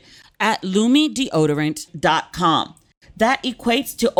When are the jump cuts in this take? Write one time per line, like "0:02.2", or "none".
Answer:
none

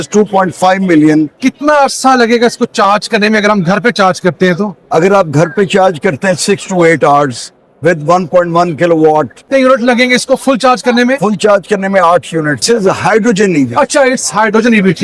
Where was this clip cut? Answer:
0:01.3
0:09.4
0:12.6

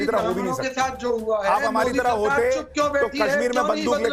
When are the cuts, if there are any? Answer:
none

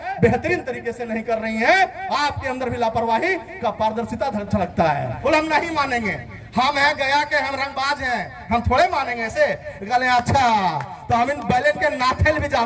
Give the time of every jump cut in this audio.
0:05.1

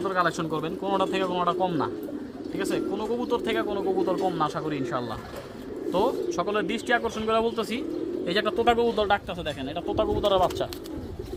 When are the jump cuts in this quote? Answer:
none

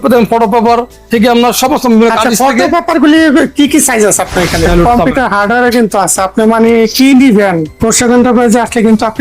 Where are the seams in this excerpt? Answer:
0:04.7
0:07.7

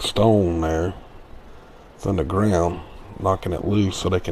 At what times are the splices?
0:02.9

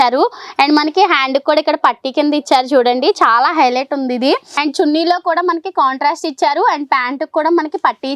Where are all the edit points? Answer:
0:04.5

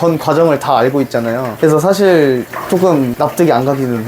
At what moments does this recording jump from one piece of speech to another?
0:01.5
0:03.1

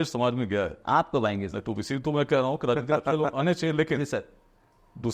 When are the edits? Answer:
none

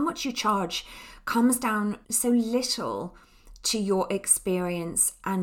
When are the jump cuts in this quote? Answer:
none

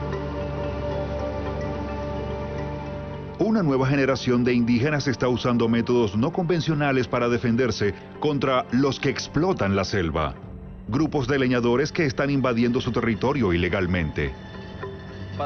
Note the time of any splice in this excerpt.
none

